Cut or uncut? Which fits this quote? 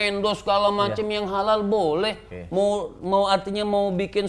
uncut